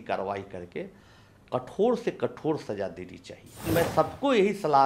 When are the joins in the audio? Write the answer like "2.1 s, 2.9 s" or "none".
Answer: 3.6 s